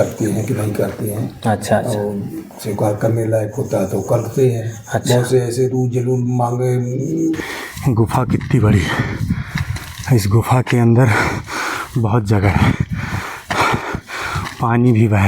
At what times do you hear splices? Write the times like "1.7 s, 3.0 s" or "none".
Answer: 7.4 s